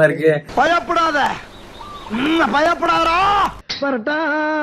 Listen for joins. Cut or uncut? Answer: cut